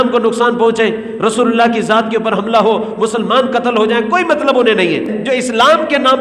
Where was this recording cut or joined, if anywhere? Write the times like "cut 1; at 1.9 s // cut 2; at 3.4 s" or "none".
cut 1; at 5.1 s